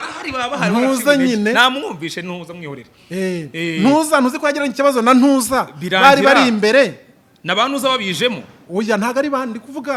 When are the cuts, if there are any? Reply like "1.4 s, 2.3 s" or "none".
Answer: none